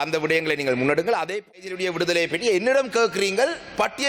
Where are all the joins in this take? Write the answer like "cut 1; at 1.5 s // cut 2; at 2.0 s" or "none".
cut 1; at 1.5 s